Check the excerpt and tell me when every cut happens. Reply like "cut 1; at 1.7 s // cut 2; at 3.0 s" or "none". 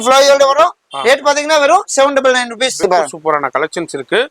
cut 1; at 2.8 s

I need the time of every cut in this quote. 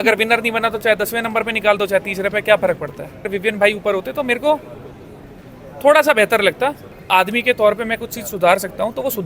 cut 1; at 3.3 s // cut 2; at 6.9 s

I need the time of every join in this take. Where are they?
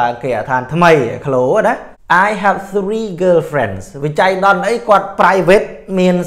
cut 1; at 1.9 s

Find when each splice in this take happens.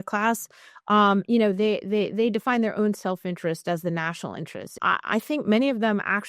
cut 1; at 4.8 s

